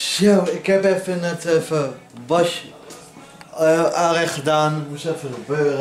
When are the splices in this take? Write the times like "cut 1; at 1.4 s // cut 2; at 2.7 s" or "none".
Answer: none